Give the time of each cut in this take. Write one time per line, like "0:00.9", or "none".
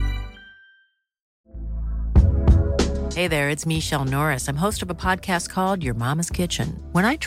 0:01.3